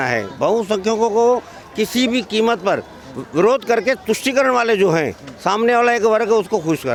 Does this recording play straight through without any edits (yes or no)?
yes